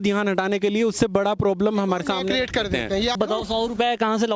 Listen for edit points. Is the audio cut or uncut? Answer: cut